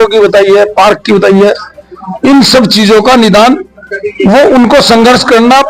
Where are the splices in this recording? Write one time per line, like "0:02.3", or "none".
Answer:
none